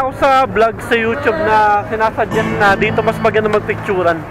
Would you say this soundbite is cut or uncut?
uncut